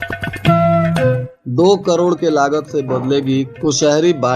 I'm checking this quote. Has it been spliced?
yes; 1 cut; at 1.3 s

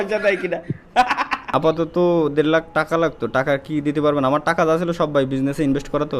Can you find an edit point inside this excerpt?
yes; 1 cut; at 1.4 s

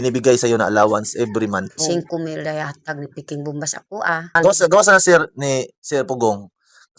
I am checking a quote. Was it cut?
yes; 2 cuts; at 1.9 s, 4.3 s

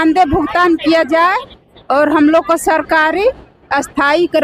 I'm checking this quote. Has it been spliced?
no; 0 cuts

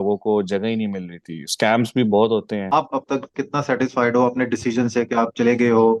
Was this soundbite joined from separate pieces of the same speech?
yes; 1 cut; at 2.7 s

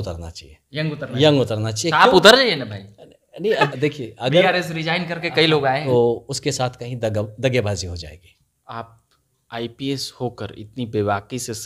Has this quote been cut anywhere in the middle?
yes; 2 cuts; at 3.7 s, 5.8 s

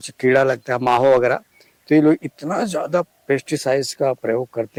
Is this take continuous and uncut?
yes; 0 cuts

